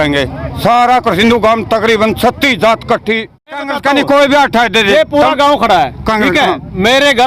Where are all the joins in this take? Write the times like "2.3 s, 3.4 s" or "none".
3.6 s